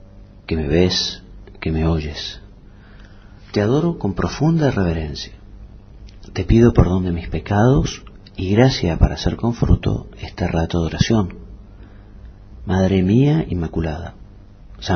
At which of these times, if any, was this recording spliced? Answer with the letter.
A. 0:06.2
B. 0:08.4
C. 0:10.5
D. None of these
D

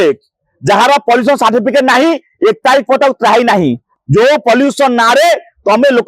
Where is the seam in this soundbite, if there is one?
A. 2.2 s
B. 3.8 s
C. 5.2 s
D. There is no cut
B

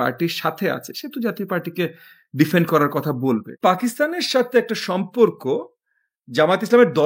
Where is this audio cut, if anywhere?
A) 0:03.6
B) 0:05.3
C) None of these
A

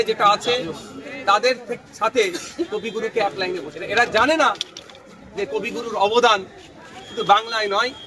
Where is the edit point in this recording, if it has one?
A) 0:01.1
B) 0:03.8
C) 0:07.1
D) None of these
B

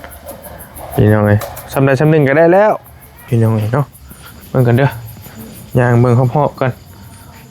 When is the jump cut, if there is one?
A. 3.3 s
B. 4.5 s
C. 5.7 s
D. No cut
A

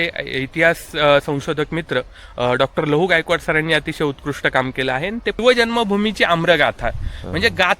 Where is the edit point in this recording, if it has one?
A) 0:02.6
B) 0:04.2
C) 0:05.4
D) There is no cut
C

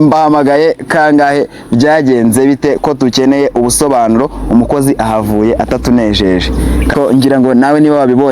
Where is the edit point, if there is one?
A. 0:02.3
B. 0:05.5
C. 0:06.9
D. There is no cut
C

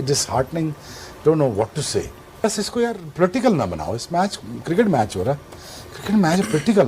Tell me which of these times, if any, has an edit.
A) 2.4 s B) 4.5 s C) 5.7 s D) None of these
A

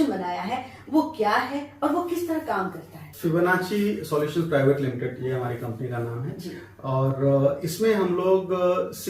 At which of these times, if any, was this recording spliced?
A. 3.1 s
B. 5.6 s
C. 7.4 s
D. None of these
A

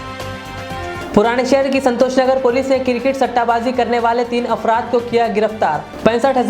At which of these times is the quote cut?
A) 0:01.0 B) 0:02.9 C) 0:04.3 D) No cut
A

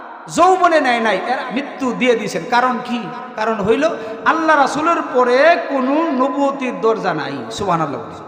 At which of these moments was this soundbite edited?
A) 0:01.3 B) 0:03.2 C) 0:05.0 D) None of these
A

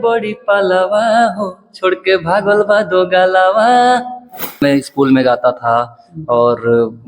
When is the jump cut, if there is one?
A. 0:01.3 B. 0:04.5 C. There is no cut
B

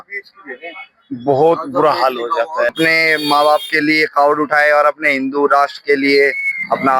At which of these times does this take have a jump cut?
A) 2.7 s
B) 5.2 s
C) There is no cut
A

